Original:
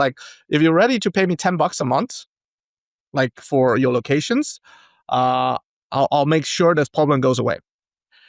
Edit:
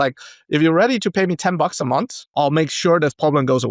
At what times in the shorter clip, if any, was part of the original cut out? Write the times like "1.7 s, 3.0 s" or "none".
2.3 s